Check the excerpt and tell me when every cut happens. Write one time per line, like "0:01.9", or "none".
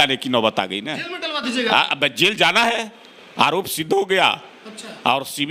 none